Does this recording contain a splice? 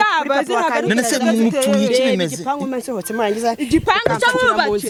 no; 0 cuts

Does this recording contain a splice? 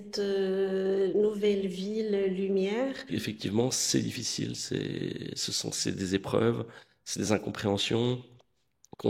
yes; 1 cut; at 3.1 s

